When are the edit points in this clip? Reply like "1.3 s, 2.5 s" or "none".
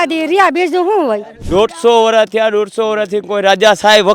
1.3 s